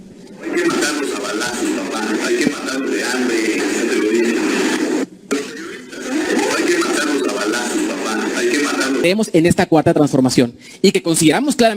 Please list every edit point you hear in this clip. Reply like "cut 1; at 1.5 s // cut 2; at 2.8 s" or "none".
cut 1; at 9.0 s